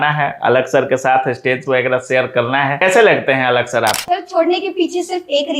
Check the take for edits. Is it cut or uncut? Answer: cut